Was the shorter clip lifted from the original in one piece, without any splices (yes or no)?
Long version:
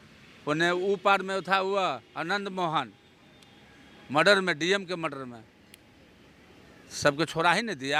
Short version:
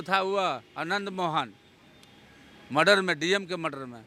yes